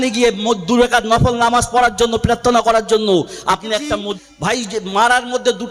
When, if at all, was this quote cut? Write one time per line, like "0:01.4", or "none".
0:04.2